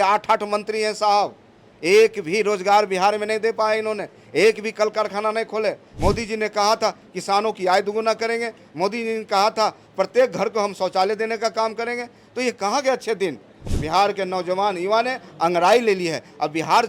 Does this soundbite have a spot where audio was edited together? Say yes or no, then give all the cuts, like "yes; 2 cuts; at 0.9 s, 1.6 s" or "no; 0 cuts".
yes; 2 cuts; at 5.9 s, 13.6 s